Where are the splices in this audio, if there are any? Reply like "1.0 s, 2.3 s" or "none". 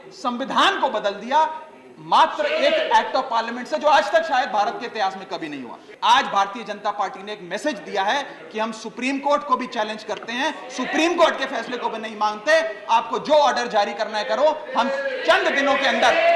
5.8 s

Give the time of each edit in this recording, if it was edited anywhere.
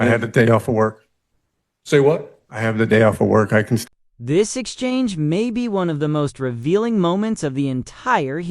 3.9 s

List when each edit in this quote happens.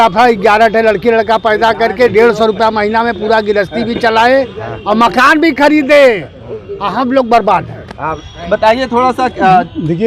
8.2 s

